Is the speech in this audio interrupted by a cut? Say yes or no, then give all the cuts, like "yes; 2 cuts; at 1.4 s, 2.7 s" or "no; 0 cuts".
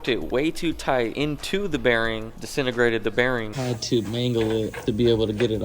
yes; 3 cuts; at 1.1 s, 3.5 s, 4.8 s